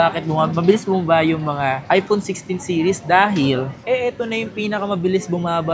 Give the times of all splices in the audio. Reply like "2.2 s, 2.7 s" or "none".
3.8 s